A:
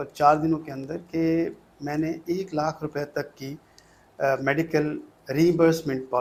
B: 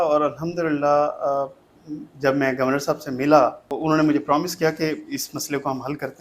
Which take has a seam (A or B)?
B